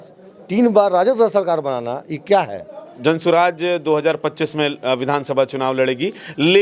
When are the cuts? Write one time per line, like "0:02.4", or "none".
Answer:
0:02.9